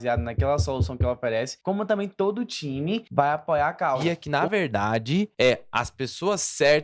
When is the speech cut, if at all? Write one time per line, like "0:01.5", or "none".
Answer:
0:01.5
0:03.1
0:04.2
0:05.3